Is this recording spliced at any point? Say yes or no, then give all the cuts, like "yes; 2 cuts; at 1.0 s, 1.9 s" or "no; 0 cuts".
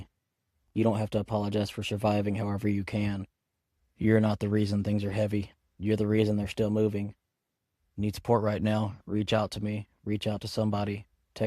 no; 0 cuts